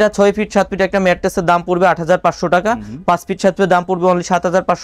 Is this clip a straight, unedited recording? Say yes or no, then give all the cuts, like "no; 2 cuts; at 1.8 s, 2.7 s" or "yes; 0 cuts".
yes; 0 cuts